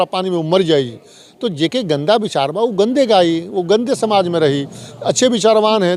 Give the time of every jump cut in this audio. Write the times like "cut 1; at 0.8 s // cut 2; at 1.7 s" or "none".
none

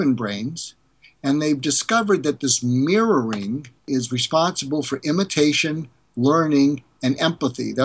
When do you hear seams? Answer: cut 1; at 3.8 s

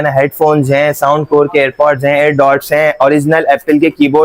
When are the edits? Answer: none

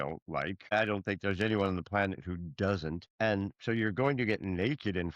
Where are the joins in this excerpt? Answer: cut 1; at 0.7 s // cut 2; at 3.0 s

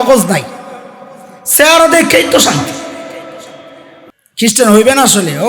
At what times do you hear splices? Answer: cut 1; at 4.0 s

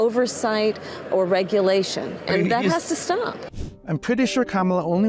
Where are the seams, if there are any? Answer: none

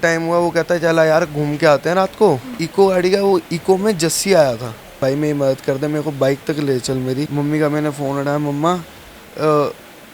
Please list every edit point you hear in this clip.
cut 1; at 2.5 s // cut 2; at 5.0 s // cut 3; at 7.3 s

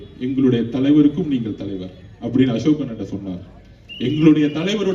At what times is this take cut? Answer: none

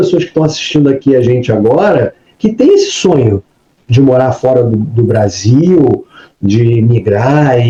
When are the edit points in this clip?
none

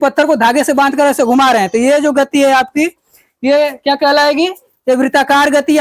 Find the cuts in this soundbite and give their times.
none

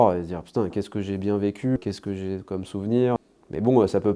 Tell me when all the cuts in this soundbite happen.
cut 1; at 1.8 s // cut 2; at 3.2 s

